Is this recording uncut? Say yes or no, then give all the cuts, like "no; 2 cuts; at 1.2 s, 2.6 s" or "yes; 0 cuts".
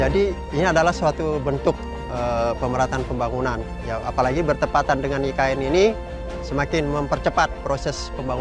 yes; 0 cuts